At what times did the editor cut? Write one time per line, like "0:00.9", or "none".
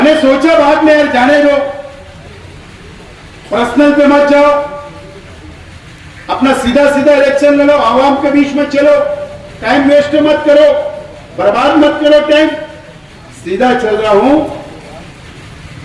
none